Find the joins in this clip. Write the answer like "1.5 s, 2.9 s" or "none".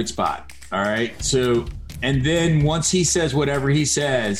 1.8 s